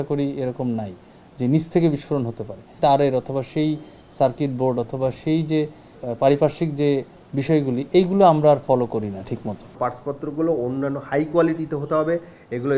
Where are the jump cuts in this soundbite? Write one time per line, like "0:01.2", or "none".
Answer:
0:02.7
0:05.9
0:09.7